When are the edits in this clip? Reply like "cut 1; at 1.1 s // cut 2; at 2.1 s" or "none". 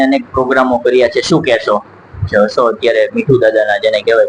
cut 1; at 2.3 s